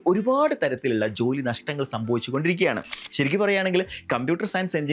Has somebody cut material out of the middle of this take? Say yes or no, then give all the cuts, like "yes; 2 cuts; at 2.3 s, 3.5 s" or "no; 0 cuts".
yes; 1 cut; at 3.0 s